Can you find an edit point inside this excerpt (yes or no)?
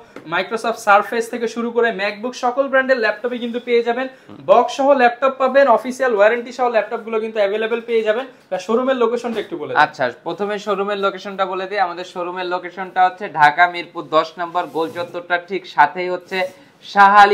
no